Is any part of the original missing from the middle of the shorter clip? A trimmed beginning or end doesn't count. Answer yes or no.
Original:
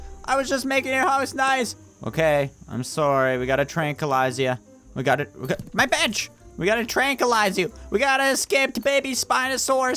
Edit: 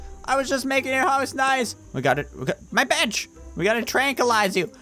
yes